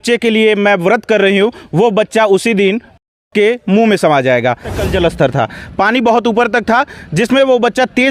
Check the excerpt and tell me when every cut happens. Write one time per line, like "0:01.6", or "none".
0:04.8